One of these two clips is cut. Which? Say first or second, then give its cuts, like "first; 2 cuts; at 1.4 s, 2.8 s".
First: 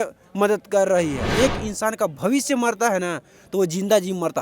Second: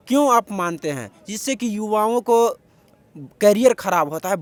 first; 1 cut; at 1.3 s